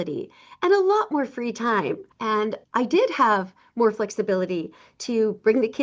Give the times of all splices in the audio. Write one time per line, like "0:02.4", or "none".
0:02.4